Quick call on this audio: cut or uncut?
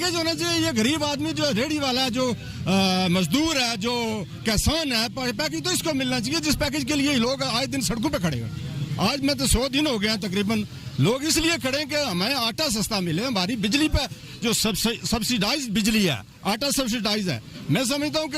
uncut